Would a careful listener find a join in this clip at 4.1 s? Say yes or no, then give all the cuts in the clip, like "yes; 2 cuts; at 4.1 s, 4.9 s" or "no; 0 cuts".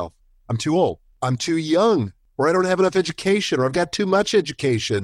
no; 2 cuts; at 1.2 s, 2.2 s